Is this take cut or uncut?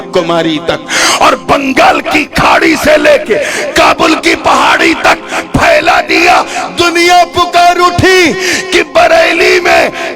uncut